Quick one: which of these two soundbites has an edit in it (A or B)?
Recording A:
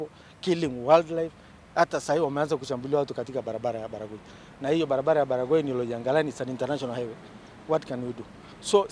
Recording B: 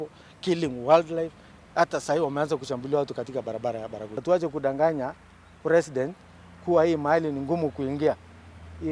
B